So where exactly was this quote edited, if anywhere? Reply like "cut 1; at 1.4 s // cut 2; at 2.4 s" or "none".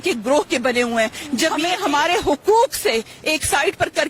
cut 1; at 1.7 s